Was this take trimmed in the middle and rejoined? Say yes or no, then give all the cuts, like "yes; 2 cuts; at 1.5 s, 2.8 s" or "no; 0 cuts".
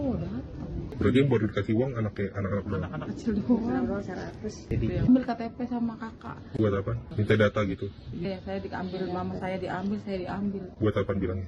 yes; 3 cuts; at 0.9 s, 4.6 s, 7.1 s